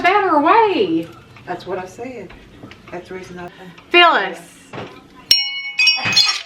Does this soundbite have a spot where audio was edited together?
yes; 2 cuts; at 1.3 s, 3.5 s

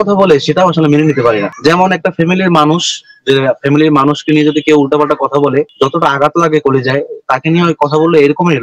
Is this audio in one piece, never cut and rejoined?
yes; 0 cuts

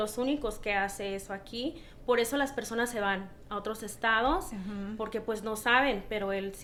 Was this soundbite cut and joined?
no; 0 cuts

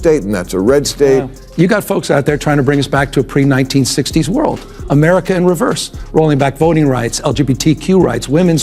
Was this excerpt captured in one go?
no; 1 cut; at 1.4 s

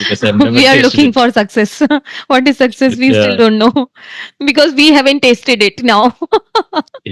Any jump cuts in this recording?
no; 0 cuts

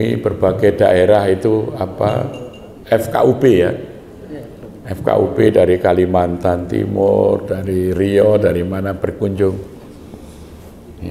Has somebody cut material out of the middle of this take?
no; 0 cuts

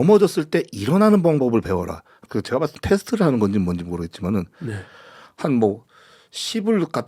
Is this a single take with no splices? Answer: no; 1 cut; at 2.2 s

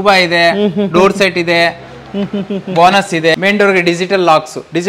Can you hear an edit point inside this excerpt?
yes; 1 cut; at 3.3 s

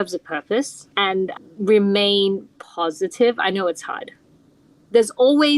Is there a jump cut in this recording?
yes; 1 cut; at 1.3 s

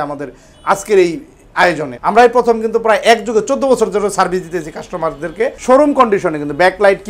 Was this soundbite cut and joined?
yes; 2 cuts; at 1.9 s, 5.6 s

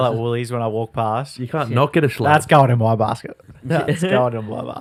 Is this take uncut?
yes; 0 cuts

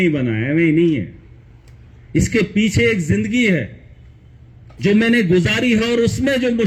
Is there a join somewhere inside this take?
no; 0 cuts

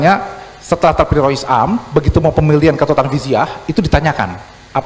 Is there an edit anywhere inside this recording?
no; 0 cuts

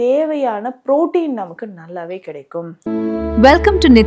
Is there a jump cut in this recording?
yes; 1 cut; at 2.8 s

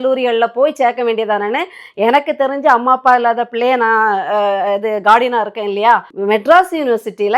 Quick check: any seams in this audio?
yes; 1 cut; at 6.1 s

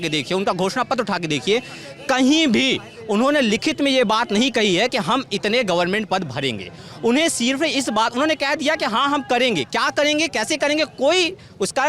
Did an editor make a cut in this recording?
no; 0 cuts

